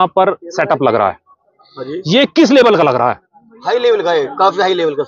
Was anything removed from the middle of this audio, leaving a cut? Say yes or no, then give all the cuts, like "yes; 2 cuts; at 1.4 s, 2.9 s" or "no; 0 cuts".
no; 0 cuts